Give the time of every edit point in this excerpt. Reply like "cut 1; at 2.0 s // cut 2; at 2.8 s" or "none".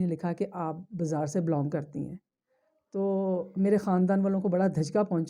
none